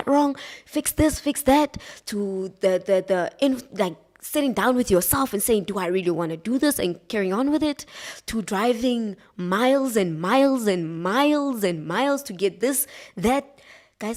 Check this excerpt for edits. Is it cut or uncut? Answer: uncut